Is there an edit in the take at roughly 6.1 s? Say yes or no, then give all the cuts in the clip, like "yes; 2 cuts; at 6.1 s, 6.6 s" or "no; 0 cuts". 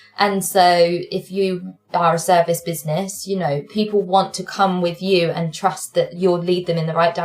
yes; 1 cut; at 6.1 s